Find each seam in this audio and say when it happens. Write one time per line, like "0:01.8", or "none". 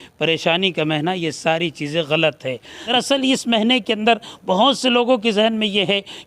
0:02.7